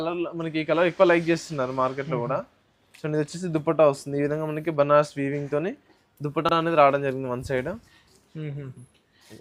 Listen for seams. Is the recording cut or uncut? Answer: uncut